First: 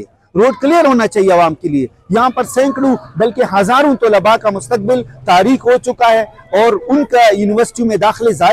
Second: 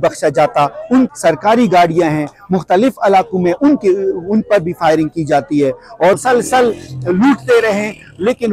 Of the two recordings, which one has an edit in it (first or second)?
second